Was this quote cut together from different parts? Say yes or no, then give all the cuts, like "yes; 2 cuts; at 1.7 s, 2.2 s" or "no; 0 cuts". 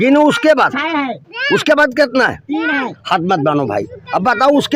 no; 0 cuts